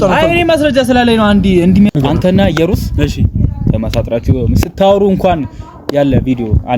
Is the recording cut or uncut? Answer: cut